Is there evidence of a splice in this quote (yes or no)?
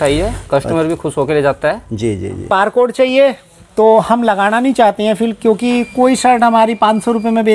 yes